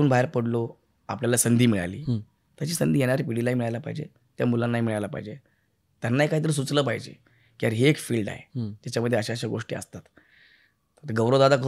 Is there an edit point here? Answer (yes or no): no